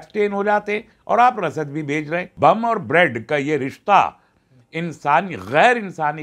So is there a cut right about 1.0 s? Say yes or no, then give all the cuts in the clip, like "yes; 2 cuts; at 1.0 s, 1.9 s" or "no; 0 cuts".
no; 1 cut; at 2.3 s